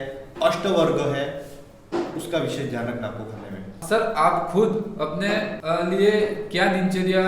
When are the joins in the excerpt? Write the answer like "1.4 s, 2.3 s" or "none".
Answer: 3.8 s, 5.6 s